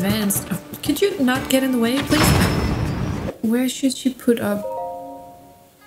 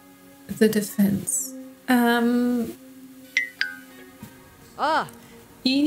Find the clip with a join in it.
first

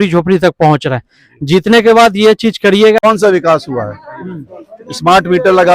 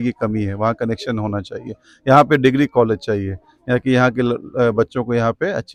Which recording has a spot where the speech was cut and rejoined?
first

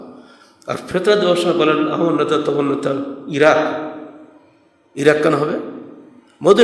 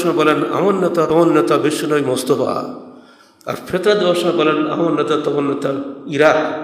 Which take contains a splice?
second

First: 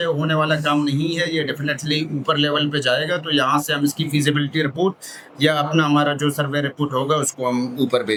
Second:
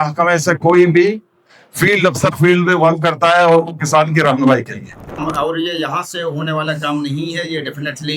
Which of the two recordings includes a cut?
second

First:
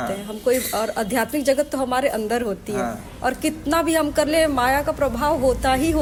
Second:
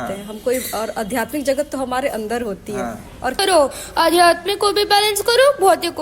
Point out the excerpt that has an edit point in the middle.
second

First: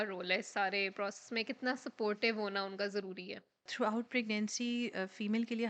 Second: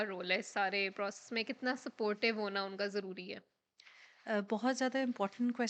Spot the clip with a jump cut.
first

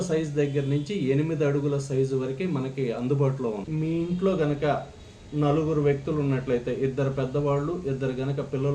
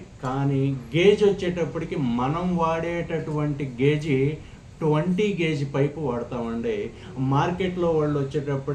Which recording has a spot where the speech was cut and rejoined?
first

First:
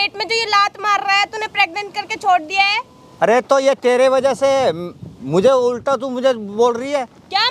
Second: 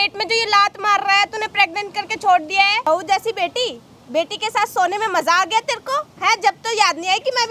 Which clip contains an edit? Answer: second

